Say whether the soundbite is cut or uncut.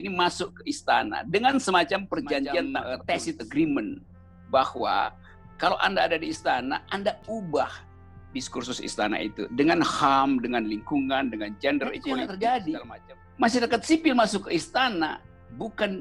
cut